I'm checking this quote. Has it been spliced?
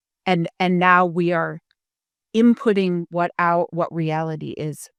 no; 0 cuts

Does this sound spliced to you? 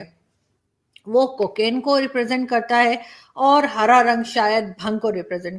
no; 0 cuts

